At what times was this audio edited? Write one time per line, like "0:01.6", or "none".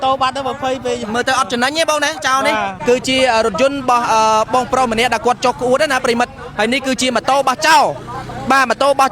0:02.7